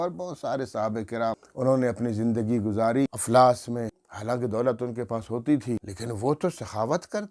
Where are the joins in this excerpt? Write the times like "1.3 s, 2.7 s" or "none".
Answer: 1.5 s, 3.2 s, 4.1 s, 5.9 s